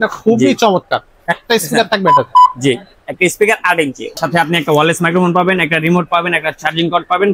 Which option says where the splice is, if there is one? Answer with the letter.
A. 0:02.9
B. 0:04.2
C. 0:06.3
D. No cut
B